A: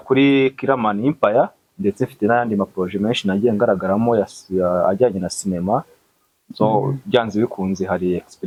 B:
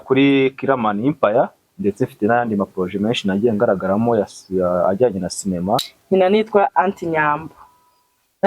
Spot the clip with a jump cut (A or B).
B